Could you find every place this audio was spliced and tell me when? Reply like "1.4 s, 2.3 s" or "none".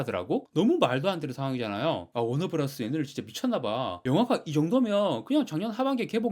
2.1 s